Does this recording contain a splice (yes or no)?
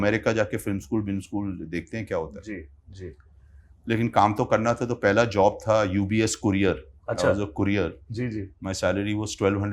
no